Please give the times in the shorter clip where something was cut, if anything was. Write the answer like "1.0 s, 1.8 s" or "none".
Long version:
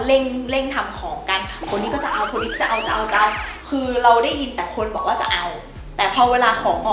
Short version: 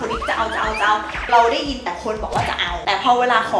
1.3 s, 2.7 s